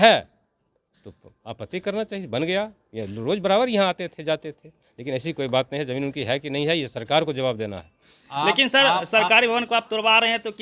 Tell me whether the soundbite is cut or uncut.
cut